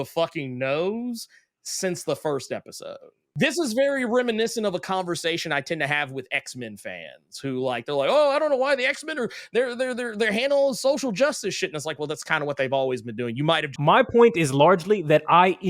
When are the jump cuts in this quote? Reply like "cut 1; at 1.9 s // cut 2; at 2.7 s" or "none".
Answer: cut 1; at 3.6 s // cut 2; at 13.9 s